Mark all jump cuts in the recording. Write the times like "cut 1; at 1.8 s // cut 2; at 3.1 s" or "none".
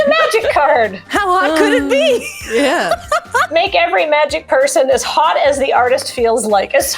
cut 1; at 1.0 s // cut 2; at 3.5 s